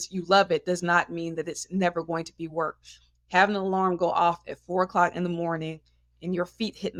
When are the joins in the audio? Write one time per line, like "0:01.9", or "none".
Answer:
none